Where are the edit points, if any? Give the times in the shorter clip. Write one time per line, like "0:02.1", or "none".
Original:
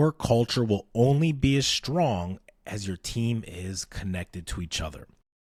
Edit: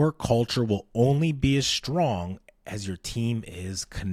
none

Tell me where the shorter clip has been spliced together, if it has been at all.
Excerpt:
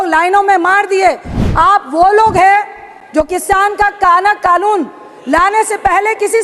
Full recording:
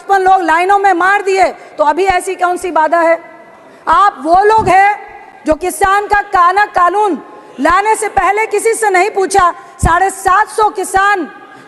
0:01.3

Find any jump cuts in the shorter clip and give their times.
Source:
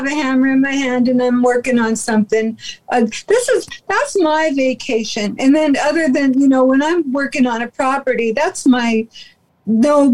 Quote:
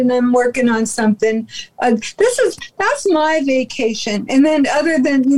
none

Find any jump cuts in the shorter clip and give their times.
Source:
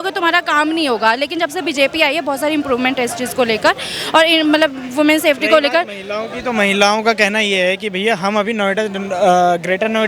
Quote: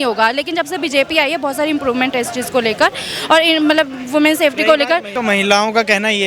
0:05.1

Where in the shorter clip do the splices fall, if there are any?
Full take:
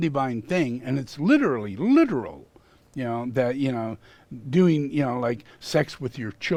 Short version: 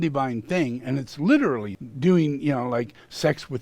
0:01.7

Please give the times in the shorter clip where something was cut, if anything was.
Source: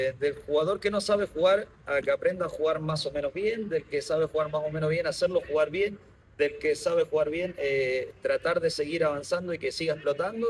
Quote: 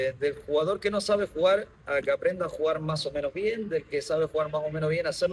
none

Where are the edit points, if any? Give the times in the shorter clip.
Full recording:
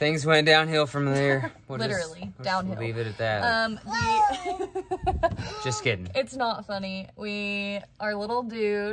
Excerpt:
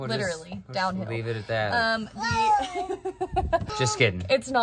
0:03.7

